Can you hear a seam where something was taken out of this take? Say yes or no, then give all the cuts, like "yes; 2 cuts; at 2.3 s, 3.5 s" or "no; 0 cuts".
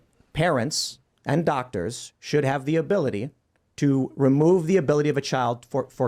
no; 0 cuts